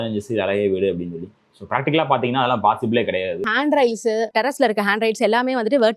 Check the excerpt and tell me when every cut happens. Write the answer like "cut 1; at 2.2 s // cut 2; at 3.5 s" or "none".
cut 1; at 3.5 s // cut 2; at 4.3 s